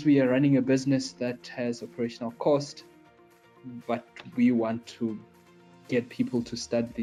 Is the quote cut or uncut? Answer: uncut